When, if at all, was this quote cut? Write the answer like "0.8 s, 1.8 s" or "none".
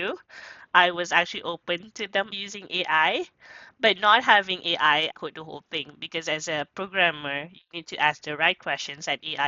none